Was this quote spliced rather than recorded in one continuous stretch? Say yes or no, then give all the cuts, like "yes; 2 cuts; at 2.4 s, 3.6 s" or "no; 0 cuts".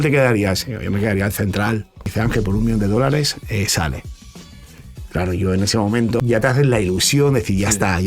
yes; 2 cuts; at 2.1 s, 6.2 s